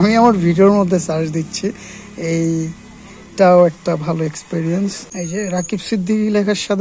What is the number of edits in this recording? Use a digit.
1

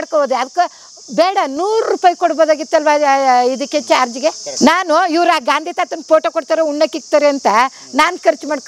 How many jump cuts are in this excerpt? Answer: 1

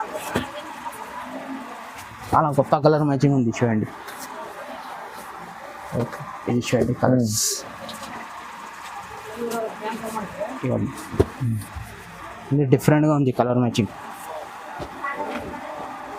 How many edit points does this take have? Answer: 0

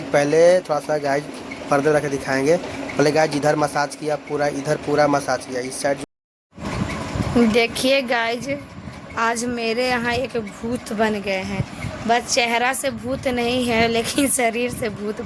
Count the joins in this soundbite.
1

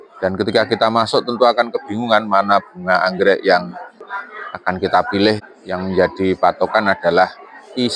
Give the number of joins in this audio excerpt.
1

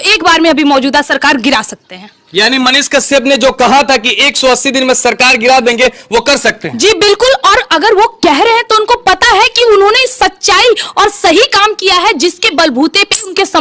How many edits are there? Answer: 0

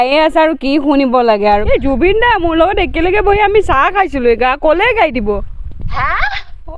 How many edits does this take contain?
1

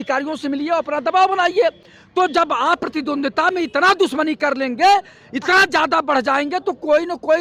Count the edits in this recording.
0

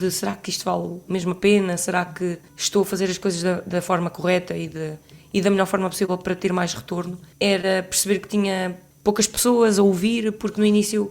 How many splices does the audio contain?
3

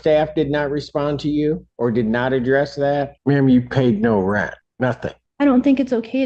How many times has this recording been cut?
3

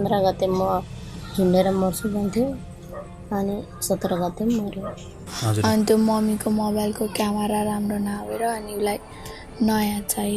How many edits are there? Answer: 1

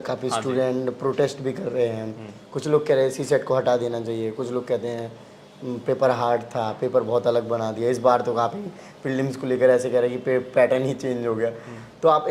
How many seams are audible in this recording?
0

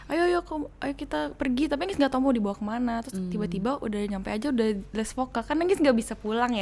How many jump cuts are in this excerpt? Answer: 0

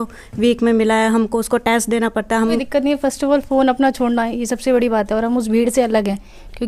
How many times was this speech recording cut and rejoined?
1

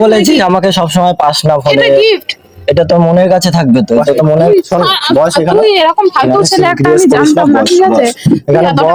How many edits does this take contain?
1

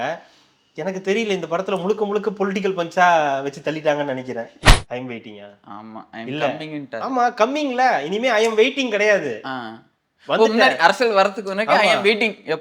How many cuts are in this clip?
1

